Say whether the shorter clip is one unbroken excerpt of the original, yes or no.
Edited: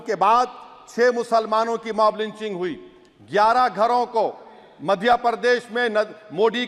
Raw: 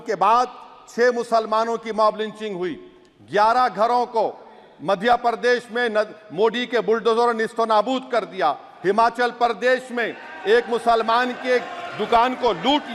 yes